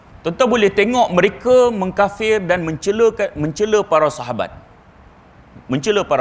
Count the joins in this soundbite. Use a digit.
1